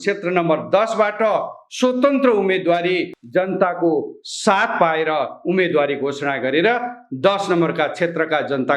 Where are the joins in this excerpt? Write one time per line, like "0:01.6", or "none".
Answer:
0:03.2